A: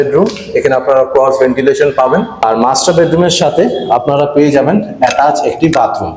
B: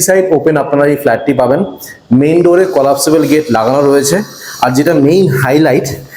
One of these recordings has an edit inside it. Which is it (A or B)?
A